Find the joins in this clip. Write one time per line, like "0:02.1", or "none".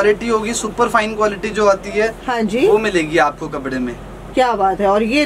none